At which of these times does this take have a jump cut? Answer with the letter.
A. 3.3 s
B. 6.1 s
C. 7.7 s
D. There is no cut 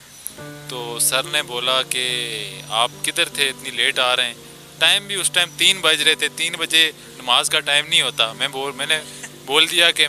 D